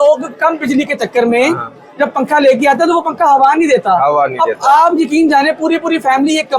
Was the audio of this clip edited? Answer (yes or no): no